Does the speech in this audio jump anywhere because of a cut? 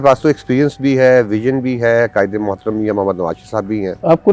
no; 0 cuts

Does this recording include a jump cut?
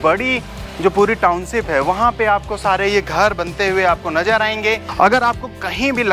yes; 1 cut; at 4.9 s

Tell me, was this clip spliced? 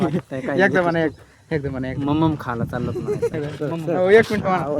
yes; 1 cut; at 3.3 s

